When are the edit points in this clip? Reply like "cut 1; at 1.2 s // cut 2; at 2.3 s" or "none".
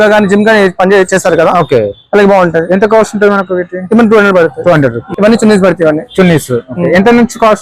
cut 1; at 5.1 s